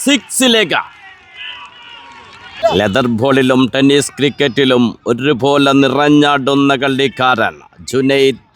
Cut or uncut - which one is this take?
cut